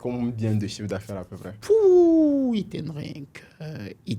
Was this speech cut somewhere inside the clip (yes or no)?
no